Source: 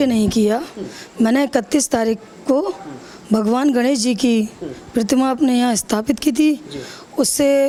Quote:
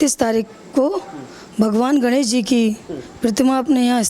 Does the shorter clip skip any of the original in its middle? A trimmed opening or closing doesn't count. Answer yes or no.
no